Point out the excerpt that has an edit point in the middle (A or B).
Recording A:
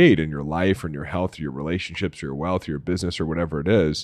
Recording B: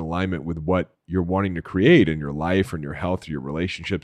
B